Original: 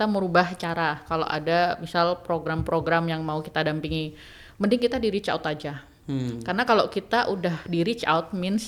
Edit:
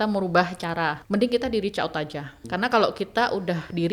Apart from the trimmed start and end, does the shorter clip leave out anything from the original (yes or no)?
yes